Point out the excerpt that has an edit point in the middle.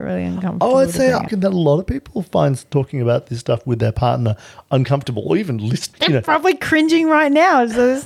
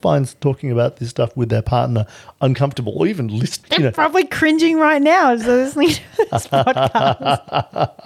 first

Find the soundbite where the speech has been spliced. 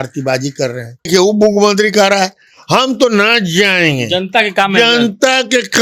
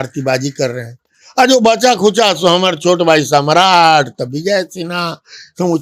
first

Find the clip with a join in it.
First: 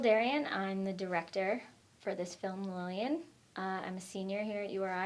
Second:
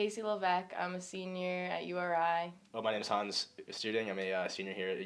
second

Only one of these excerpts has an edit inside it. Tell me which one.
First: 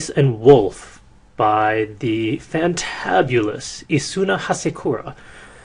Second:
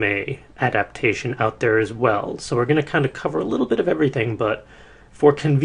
first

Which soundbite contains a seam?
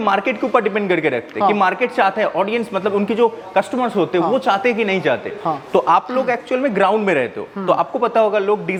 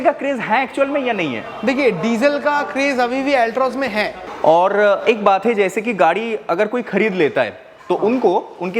second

